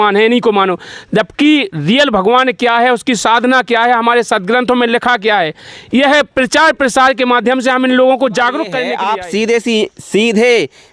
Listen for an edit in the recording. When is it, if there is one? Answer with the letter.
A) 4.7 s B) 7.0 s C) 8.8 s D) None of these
C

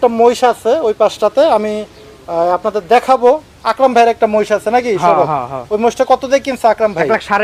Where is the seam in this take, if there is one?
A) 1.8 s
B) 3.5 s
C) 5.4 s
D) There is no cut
D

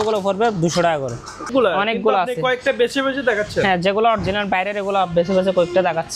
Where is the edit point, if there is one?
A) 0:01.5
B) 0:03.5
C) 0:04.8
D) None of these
A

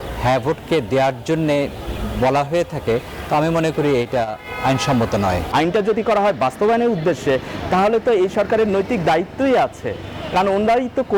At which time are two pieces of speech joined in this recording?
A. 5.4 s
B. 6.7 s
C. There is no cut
A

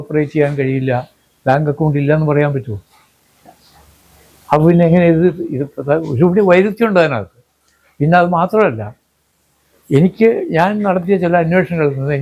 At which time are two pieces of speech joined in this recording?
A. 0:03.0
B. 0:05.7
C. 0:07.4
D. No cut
D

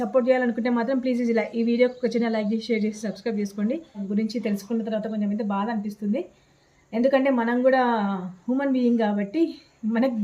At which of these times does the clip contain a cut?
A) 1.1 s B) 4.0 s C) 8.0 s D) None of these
B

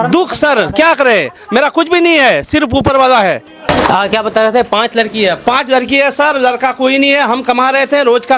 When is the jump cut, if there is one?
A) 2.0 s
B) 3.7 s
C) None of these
B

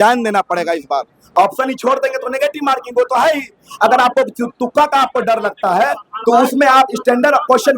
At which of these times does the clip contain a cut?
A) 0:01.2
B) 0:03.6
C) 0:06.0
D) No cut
A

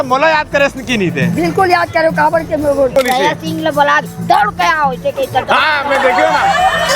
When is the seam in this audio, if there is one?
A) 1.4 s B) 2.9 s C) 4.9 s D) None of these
B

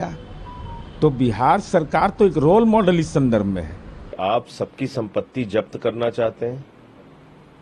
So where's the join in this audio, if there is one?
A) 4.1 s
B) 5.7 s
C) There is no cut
A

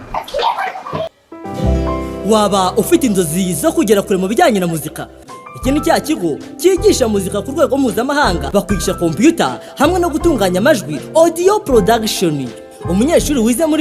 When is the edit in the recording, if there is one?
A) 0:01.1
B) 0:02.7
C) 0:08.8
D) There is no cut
A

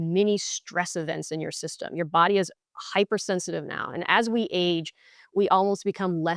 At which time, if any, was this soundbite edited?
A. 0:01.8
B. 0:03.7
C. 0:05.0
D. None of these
D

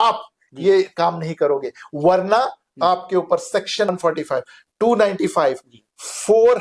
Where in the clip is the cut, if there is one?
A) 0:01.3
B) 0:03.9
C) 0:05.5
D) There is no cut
B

